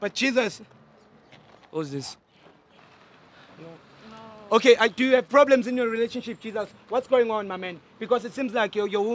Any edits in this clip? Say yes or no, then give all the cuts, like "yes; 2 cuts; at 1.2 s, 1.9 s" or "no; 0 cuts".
yes; 1 cut; at 2.8 s